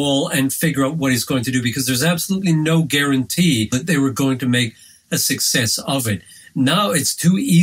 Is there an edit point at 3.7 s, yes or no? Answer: yes